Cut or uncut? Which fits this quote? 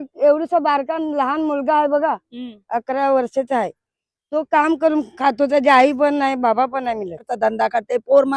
cut